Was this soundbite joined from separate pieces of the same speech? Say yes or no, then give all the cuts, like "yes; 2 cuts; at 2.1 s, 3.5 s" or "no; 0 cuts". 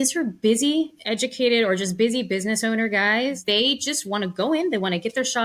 yes; 2 cuts; at 1.0 s, 3.4 s